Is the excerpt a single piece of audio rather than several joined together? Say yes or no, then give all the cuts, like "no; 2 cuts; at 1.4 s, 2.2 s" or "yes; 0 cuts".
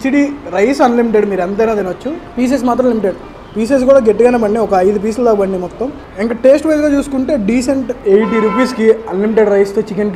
yes; 0 cuts